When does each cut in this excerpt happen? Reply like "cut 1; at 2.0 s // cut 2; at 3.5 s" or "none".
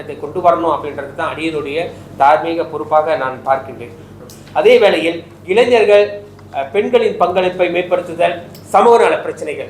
cut 1; at 4.3 s